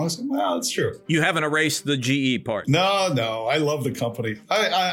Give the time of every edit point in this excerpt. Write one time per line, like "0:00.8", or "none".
0:02.6